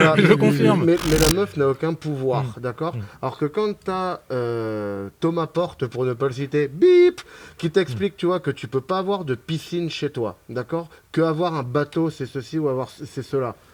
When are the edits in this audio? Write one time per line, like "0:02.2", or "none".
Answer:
none